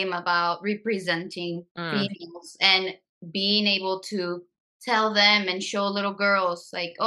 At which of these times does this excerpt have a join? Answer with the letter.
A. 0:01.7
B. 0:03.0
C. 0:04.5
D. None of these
D